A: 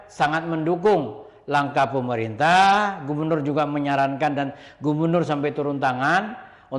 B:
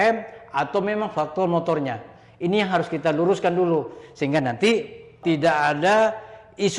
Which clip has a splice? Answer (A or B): B